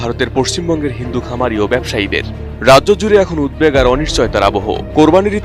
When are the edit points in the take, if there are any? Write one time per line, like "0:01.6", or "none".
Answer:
none

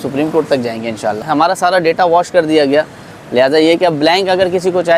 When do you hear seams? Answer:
0:01.2

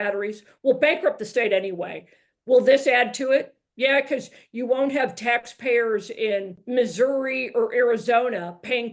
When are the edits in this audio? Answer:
0:06.6

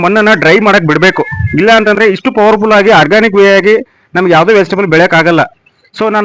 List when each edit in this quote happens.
none

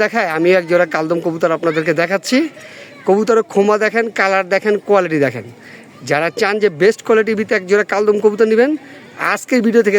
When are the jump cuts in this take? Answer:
none

